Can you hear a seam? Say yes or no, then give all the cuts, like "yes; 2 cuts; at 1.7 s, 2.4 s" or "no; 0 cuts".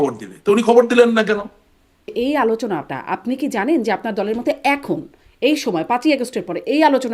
yes; 1 cut; at 2.1 s